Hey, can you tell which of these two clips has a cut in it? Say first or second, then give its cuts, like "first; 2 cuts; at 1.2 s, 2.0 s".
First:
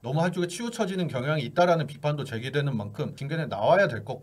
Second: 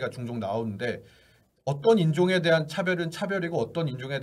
first; 1 cut; at 3.2 s